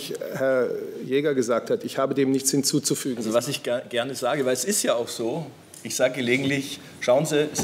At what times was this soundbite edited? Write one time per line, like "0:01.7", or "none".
0:03.1